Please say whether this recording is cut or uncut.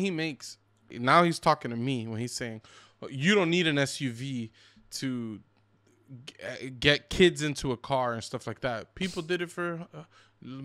cut